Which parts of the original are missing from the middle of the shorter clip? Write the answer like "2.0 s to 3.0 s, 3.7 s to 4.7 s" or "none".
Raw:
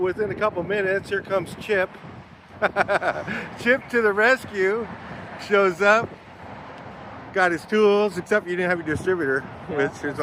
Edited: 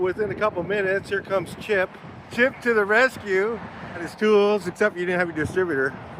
2.2 s to 3.4 s, 5.4 s to 7.6 s